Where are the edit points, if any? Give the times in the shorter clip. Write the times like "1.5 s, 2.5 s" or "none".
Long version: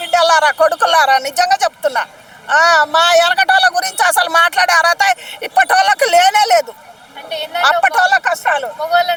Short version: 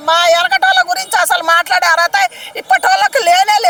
none